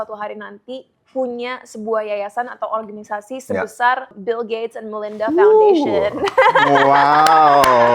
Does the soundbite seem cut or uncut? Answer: cut